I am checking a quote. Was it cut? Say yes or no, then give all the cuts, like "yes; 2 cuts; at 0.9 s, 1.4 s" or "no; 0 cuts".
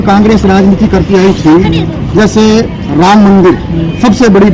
no; 0 cuts